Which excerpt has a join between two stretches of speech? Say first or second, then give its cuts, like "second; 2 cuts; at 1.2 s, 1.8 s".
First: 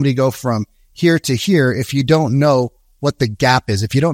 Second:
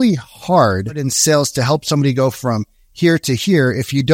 second; 1 cut; at 1.1 s